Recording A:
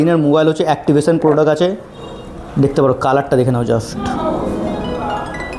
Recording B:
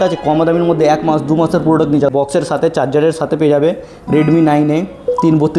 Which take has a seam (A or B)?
B